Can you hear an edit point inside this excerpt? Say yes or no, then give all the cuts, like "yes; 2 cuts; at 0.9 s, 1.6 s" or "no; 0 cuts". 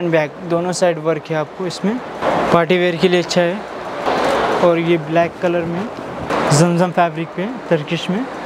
no; 0 cuts